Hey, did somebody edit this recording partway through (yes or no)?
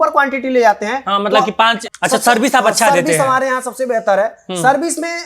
yes